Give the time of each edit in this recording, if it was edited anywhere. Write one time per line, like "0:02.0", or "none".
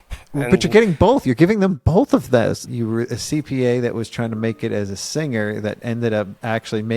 0:02.6